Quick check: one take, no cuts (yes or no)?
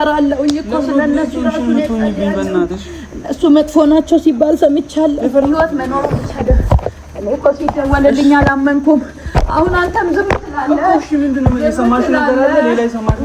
no